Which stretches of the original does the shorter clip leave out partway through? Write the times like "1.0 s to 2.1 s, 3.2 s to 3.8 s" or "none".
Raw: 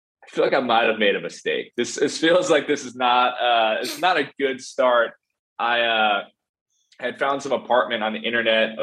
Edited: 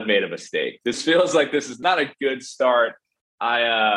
1.9 s to 2.2 s, 2.9 s to 3.9 s